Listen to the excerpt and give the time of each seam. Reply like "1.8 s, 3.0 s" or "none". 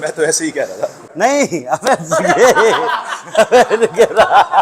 1.0 s

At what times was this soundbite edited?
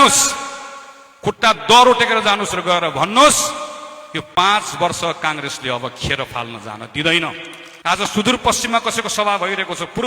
7.9 s

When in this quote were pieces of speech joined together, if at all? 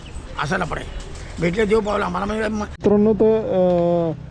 2.9 s

